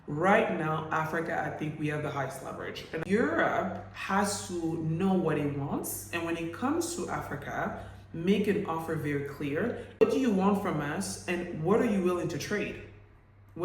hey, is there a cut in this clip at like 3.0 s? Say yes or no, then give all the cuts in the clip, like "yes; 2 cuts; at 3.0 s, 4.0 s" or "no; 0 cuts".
yes; 2 cuts; at 3.0 s, 10.0 s